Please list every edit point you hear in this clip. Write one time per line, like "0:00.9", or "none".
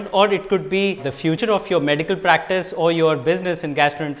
0:01.3